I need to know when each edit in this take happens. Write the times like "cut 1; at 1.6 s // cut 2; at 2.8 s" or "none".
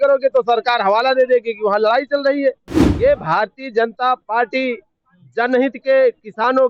none